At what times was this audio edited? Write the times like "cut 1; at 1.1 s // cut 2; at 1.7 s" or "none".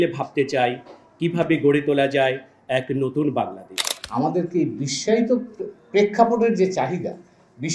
cut 1; at 3.9 s